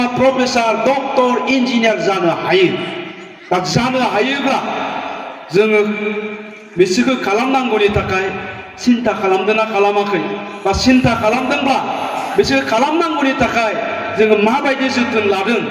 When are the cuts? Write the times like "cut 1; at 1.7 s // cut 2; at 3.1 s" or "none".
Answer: none